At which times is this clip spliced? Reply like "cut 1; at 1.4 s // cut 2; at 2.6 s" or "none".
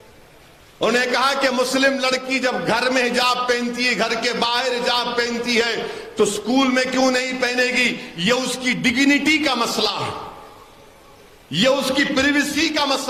none